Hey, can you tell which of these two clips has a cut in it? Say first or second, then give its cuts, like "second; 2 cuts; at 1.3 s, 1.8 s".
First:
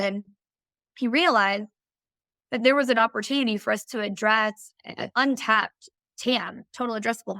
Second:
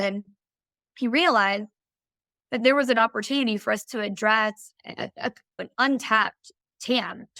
first; 1 cut; at 5.1 s